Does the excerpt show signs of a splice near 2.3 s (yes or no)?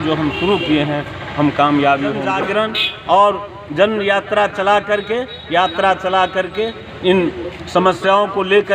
yes